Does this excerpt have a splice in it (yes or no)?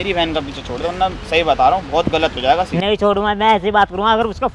no